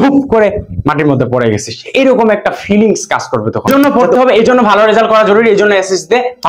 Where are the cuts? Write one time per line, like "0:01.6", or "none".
0:03.7